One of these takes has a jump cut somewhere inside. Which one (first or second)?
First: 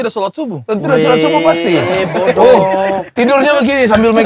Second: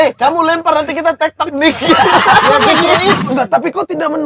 second